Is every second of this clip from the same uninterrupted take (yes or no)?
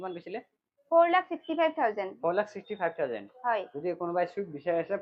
yes